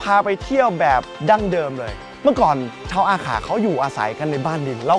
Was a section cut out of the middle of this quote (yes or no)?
yes